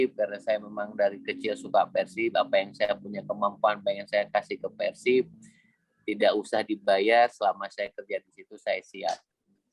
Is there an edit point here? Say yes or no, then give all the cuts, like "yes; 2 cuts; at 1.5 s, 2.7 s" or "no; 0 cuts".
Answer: no; 0 cuts